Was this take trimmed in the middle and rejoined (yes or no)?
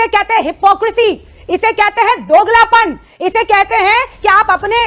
no